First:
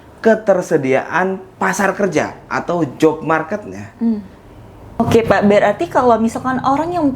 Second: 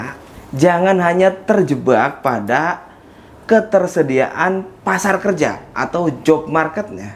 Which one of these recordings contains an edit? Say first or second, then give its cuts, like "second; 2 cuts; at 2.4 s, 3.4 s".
first; 1 cut; at 4.9 s